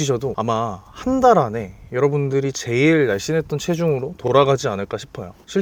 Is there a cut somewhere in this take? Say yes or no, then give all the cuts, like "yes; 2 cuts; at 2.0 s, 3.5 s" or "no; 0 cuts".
no; 0 cuts